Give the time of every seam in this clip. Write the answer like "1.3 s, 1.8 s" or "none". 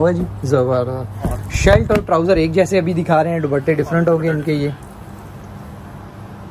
none